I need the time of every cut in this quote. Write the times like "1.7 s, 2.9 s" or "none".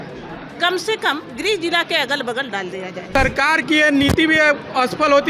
3.2 s